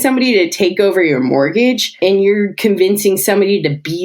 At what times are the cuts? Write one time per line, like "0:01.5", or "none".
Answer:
0:02.0